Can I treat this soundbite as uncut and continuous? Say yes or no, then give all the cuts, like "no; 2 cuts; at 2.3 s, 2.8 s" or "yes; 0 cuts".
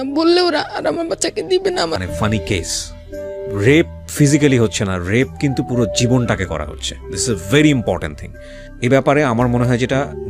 no; 1 cut; at 2.0 s